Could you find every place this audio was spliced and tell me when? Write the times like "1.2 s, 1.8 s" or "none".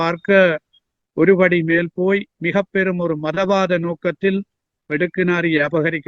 none